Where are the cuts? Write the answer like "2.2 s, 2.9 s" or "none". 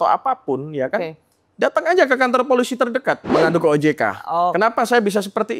3.2 s